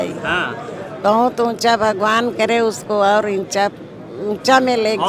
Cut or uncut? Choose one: uncut